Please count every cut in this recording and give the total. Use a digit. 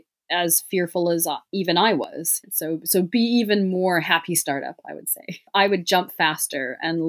2